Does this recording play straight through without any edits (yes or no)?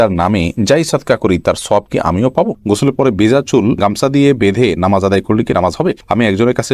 no